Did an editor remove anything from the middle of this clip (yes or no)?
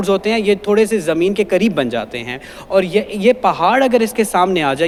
no